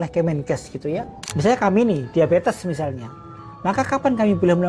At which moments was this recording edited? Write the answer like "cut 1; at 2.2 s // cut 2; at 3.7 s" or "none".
cut 1; at 1.2 s